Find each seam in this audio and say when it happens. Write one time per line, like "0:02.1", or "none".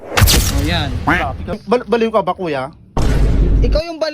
0:01.6